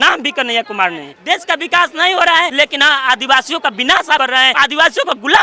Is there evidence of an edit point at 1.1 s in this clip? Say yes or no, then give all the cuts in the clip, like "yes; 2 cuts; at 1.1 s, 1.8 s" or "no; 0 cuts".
yes; 3 cuts; at 1.1 s, 2.5 s, 4.2 s